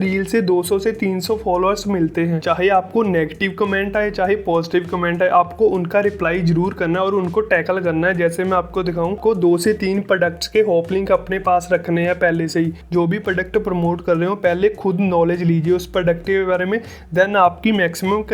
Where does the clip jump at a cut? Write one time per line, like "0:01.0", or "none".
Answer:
0:02.4
0:09.2
0:12.8